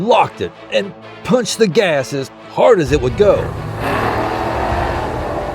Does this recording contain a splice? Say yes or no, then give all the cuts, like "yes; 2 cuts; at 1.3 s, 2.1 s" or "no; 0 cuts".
yes; 1 cut; at 3.6 s